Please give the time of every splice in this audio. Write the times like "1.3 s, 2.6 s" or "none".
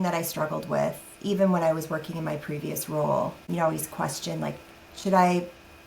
3.5 s